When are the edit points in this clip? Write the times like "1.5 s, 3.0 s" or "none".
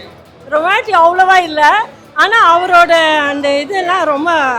none